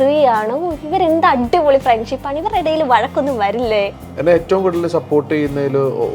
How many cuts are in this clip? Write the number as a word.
one